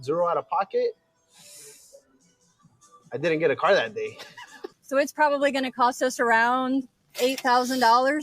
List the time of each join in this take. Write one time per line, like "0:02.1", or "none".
0:04.7